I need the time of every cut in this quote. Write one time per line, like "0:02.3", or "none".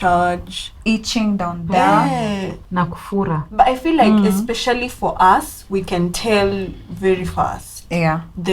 none